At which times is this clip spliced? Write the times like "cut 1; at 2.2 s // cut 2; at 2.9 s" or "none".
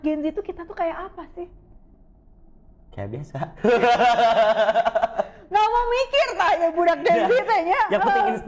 none